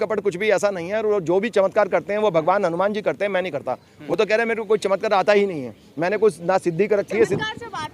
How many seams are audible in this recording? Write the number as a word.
one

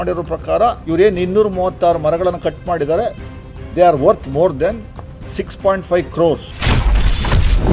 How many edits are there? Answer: one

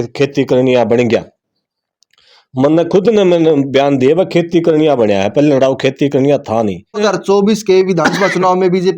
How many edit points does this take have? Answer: one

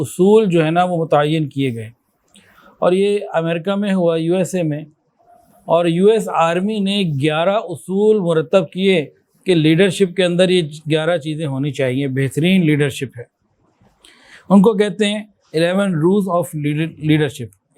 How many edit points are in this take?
zero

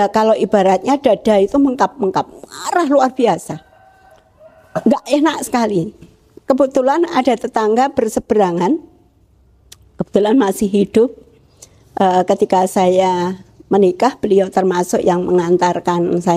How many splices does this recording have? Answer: zero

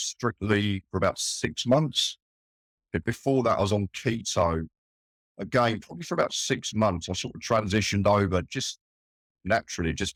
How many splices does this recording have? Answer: zero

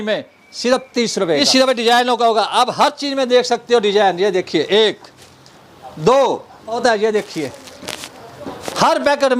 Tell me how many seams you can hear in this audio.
two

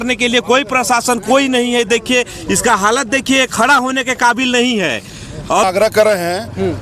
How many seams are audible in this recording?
one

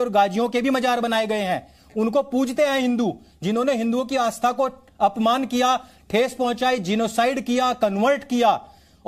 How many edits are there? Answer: zero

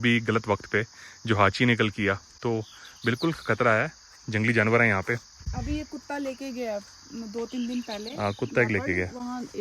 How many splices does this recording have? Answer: zero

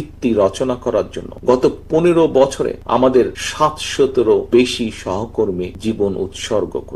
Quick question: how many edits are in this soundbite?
five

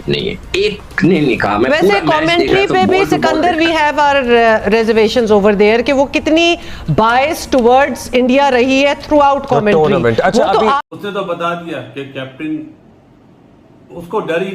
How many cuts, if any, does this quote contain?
one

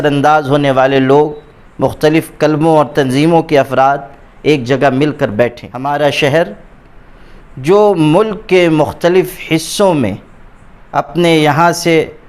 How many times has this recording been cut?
one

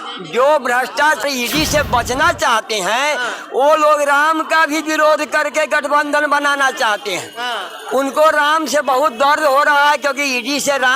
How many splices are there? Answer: one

